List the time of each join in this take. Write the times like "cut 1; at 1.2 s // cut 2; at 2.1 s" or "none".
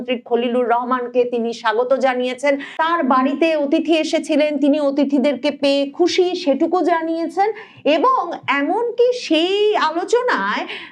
cut 1; at 2.7 s